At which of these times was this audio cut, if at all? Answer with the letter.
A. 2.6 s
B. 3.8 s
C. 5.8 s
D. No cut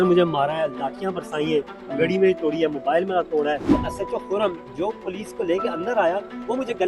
B